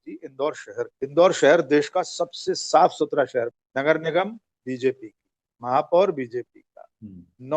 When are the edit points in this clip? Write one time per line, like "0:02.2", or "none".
0:00.9
0:03.6